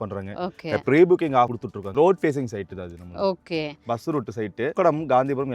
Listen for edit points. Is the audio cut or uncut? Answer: cut